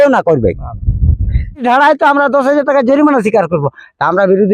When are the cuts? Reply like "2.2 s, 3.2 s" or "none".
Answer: 1.6 s

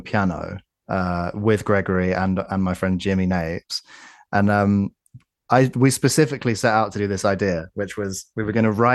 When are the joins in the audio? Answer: none

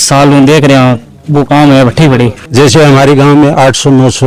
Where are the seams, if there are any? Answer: 2.4 s

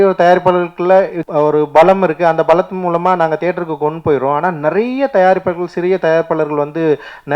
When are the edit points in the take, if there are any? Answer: 1.2 s

